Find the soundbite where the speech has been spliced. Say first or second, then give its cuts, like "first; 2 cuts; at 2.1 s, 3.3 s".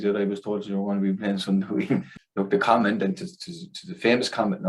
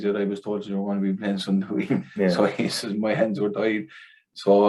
first; 1 cut; at 2.1 s